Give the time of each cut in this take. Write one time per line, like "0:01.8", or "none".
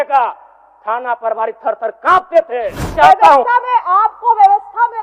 0:02.9